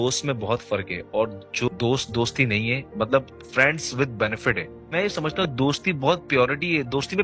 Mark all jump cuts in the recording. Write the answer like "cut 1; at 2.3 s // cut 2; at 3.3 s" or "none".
cut 1; at 1.7 s // cut 2; at 4.9 s